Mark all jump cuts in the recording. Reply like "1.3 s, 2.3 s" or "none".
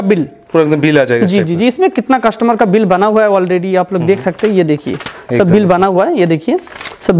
none